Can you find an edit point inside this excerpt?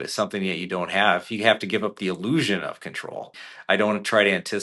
yes; 1 cut; at 3.5 s

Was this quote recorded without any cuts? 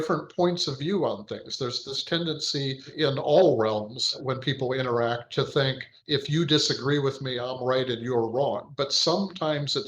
no; 3 cuts; at 2.9 s, 4.2 s, 5.9 s

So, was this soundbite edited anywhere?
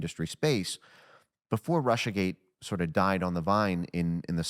no; 0 cuts

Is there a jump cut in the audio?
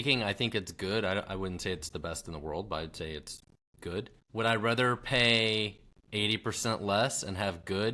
yes; 1 cut; at 4.2 s

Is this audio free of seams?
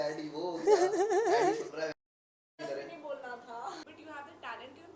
yes; 0 cuts

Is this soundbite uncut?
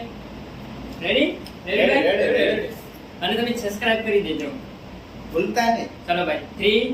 yes; 0 cuts

